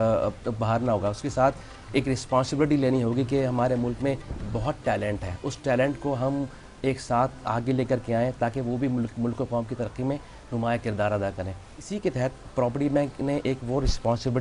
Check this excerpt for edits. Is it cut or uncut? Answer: uncut